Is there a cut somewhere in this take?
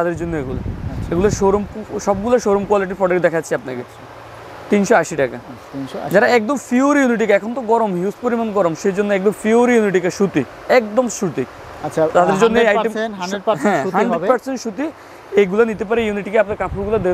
no; 0 cuts

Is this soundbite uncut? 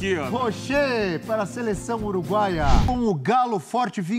no; 1 cut; at 2.8 s

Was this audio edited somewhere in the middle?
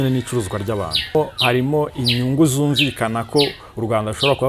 yes; 1 cut; at 1.2 s

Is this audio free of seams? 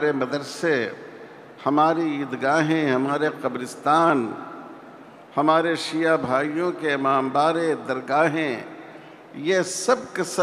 yes; 0 cuts

